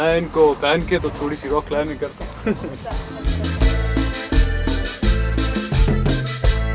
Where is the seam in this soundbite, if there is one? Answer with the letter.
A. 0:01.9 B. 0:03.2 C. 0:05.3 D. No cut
B